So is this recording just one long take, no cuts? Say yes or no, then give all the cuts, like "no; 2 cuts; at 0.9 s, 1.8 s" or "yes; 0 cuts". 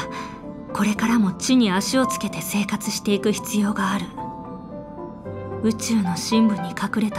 no; 2 cuts; at 4.2 s, 5.6 s